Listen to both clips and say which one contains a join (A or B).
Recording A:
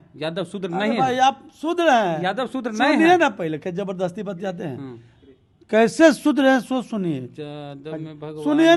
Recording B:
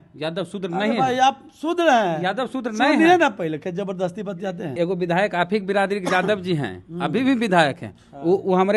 B